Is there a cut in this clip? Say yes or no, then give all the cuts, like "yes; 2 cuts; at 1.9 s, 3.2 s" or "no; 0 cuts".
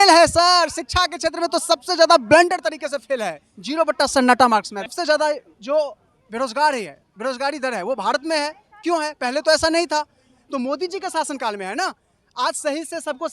yes; 1 cut; at 4.9 s